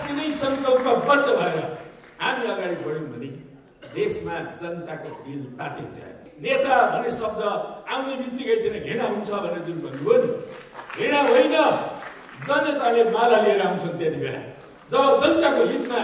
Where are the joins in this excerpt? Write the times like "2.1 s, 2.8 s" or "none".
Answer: 6.3 s